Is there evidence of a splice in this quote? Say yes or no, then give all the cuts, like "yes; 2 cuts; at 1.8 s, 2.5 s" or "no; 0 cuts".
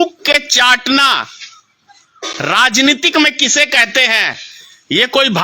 no; 0 cuts